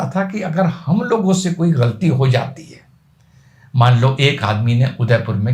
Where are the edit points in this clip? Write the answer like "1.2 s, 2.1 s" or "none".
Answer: none